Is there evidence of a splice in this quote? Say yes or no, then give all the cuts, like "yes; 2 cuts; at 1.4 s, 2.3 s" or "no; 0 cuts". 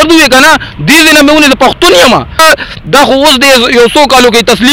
yes; 1 cut; at 2.4 s